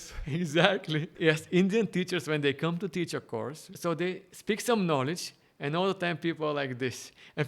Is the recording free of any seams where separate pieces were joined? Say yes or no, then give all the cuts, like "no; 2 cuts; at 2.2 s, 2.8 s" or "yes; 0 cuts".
no; 2 cuts; at 1.1 s, 3.7 s